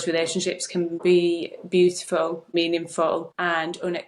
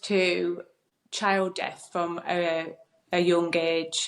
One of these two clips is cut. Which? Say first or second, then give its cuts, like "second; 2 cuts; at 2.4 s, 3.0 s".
first; 3 cuts; at 0.9 s, 2.5 s, 3.3 s